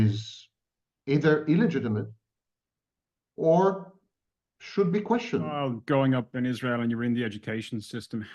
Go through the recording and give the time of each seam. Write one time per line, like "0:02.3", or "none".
0:05.7